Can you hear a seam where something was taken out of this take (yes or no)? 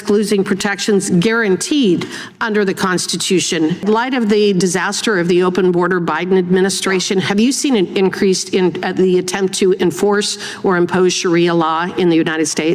yes